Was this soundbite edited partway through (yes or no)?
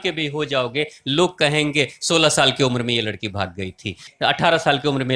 no